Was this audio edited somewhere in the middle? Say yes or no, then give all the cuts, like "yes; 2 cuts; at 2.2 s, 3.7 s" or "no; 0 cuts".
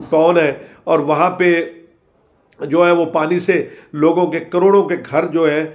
no; 0 cuts